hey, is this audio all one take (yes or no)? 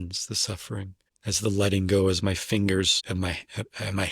no